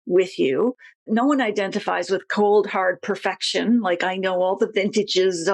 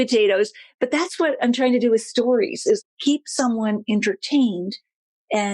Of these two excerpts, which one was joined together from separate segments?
second; 1 cut; at 2.8 s

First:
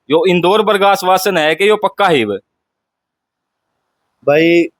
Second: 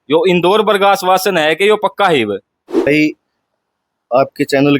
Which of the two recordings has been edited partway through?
second; 1 cut; at 2.9 s

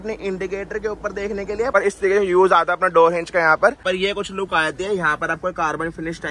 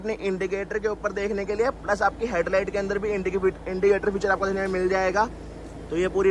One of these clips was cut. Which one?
first; 2 cuts; at 1.7 s, 3.8 s

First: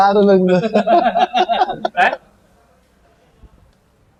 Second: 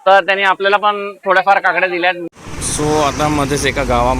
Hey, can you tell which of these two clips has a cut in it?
second; 1 cut; at 2.2 s

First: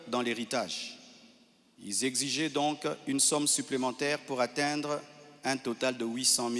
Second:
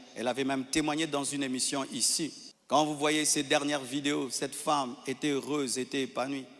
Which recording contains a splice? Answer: second; 1 cut; at 2.5 s

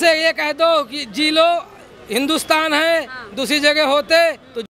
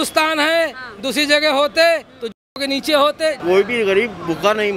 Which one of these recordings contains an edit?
second; 1 cut; at 3.4 s

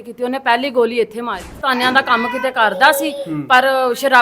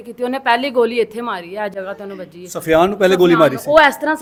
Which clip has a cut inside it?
first; 1 cut; at 1.6 s

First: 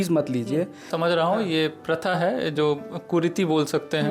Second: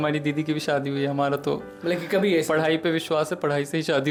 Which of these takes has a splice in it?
first; 1 cut; at 0.9 s

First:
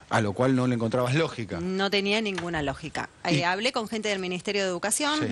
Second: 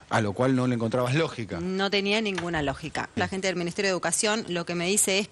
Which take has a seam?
second; 1 cut; at 3.2 s

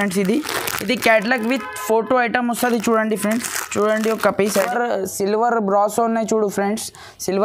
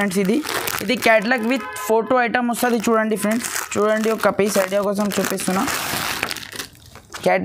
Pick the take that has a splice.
first; 1 cut; at 4.7 s

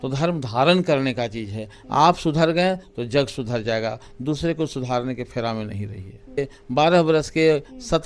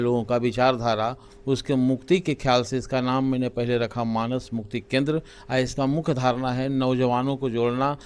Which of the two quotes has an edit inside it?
first; 1 cut; at 6.4 s

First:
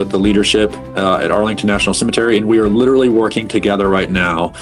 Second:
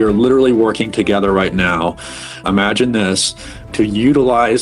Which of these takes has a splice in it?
second; 1 cut; at 3.7 s

